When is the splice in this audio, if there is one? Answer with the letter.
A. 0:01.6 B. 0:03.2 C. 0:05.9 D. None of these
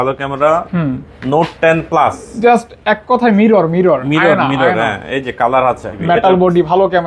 C